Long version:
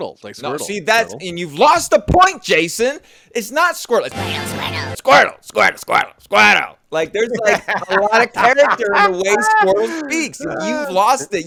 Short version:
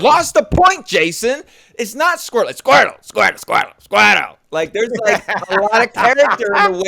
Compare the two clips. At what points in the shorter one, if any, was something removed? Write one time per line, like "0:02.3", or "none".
0:02.6